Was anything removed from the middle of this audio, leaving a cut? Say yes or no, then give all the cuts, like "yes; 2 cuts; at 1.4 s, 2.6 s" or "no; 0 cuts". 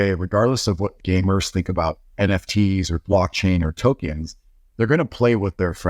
no; 0 cuts